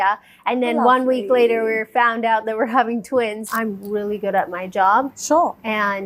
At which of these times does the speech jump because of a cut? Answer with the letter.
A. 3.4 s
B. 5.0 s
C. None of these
A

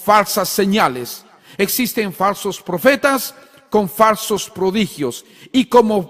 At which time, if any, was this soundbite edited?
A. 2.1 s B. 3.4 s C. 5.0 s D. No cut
A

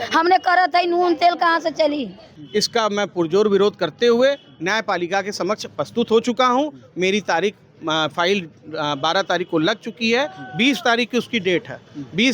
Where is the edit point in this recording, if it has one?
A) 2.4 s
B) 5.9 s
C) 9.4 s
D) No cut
A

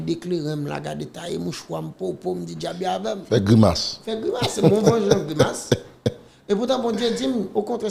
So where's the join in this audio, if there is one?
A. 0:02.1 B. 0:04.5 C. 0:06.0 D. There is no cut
D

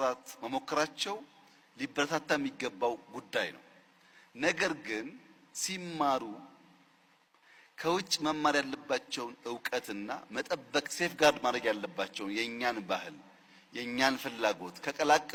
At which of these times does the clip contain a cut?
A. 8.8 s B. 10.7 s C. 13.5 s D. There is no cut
D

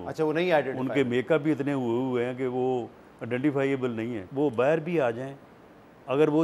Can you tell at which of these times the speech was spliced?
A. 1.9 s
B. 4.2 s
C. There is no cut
B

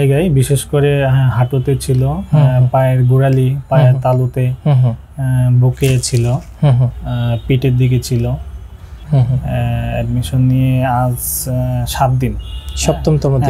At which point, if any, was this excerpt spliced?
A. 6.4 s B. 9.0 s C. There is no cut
B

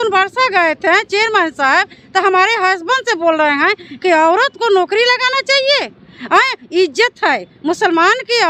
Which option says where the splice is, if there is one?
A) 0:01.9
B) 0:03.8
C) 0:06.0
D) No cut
D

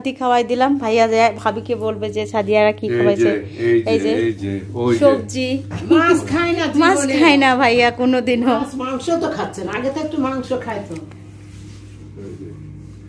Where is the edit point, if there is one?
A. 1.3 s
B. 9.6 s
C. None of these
C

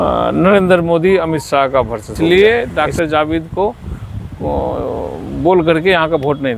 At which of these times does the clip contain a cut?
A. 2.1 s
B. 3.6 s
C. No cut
A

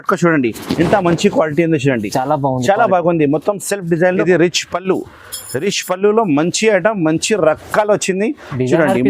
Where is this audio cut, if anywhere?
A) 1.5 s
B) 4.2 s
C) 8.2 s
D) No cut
B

